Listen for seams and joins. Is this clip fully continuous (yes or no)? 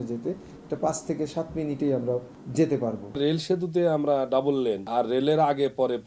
no